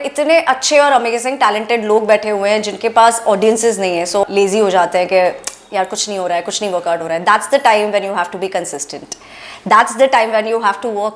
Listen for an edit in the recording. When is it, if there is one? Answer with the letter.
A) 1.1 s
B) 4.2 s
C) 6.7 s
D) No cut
B